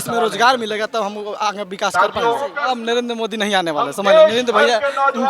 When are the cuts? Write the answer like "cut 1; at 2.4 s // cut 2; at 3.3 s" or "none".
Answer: cut 1; at 2.6 s